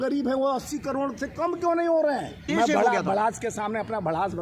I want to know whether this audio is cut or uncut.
cut